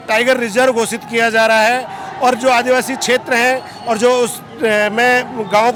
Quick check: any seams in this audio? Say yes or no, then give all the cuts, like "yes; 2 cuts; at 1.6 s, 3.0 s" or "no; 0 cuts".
no; 0 cuts